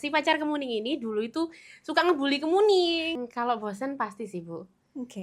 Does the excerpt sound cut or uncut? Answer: cut